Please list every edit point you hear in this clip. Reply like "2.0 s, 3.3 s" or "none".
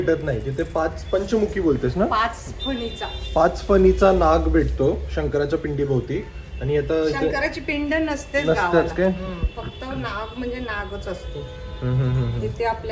none